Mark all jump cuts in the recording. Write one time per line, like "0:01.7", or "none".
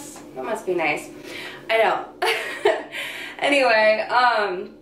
none